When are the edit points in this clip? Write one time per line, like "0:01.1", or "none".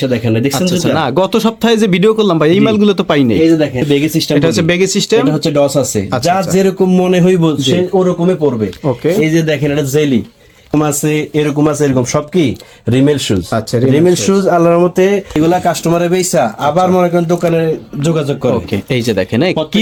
none